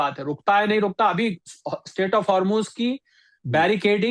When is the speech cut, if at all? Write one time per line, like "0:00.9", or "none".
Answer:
none